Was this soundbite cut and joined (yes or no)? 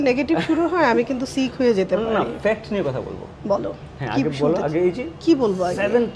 no